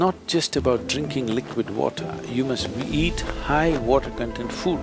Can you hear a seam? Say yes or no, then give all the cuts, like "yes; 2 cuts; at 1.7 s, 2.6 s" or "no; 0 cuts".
no; 0 cuts